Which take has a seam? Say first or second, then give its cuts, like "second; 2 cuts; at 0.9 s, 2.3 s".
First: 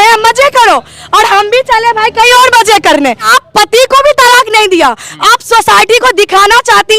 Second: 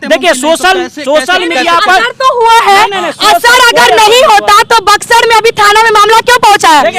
first; 1 cut; at 3.3 s